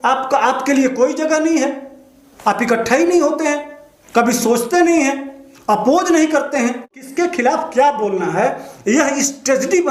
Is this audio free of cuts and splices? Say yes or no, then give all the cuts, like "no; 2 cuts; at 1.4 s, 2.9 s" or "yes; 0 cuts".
no; 1 cut; at 7.0 s